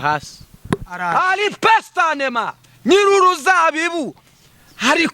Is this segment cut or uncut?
cut